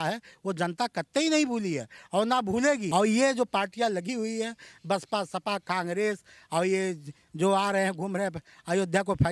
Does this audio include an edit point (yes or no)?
yes